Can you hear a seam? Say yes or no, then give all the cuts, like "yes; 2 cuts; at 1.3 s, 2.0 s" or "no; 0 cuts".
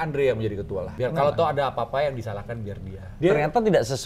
yes; 2 cuts; at 0.9 s, 3.1 s